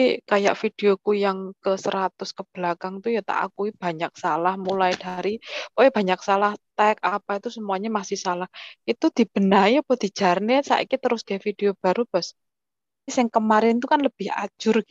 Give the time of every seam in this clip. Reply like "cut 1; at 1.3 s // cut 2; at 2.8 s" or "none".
cut 1; at 13.1 s